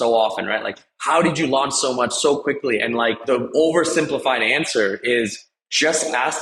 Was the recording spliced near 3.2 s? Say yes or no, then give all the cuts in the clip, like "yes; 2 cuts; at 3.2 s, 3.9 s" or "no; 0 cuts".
yes; 1 cut; at 3.2 s